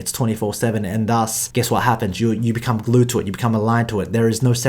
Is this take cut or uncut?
cut